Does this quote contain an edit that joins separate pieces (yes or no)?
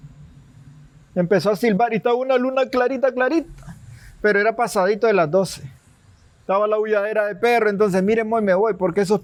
no